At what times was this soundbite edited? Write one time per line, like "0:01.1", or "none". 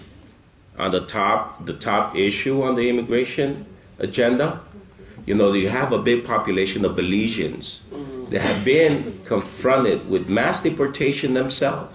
none

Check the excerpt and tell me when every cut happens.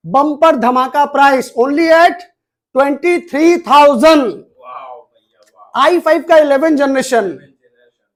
none

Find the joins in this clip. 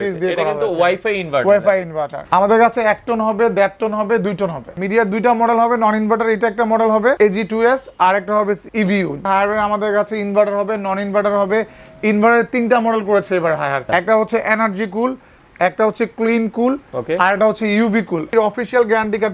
0:02.1
0:04.8
0:07.2
0:09.1
0:13.8
0:18.3

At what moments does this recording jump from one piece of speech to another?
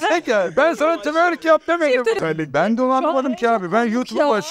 0:02.2

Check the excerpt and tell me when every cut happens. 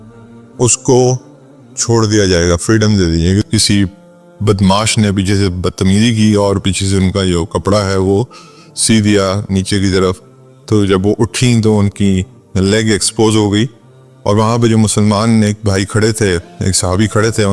0:03.4

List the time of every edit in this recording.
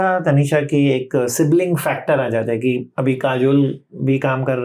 0:02.9

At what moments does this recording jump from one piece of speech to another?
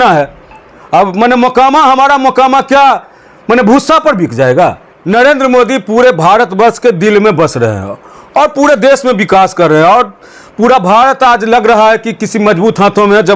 0:04.9

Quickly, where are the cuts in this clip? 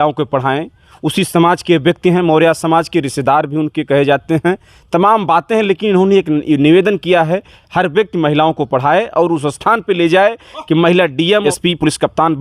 0:11.4

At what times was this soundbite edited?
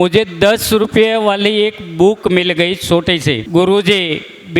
0:03.4

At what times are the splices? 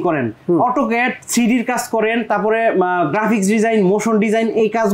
none

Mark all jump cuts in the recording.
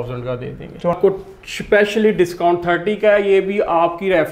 0:01.0

